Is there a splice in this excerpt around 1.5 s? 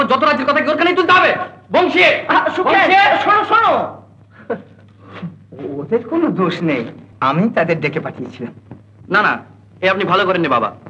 no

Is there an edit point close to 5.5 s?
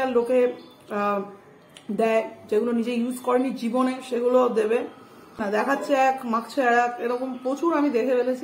no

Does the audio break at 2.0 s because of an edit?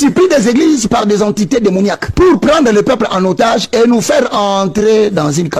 yes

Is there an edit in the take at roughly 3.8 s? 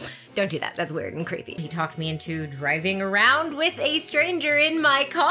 no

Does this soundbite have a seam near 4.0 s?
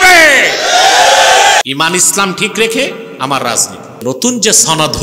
yes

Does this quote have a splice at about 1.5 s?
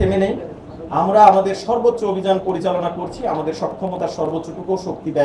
no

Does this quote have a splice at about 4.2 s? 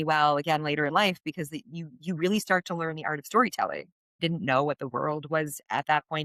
yes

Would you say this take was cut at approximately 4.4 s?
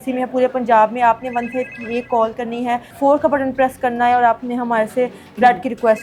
no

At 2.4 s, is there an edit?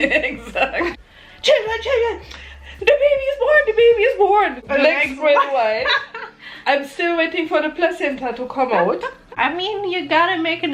no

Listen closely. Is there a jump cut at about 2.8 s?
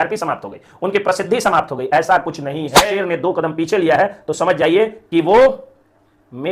yes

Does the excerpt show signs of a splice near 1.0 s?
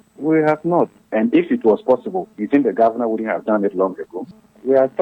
yes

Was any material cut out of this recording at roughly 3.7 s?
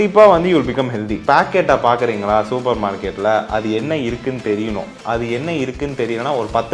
no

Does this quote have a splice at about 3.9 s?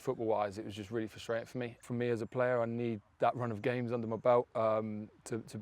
no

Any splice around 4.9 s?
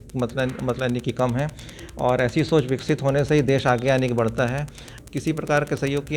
yes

